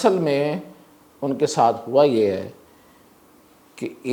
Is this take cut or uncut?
uncut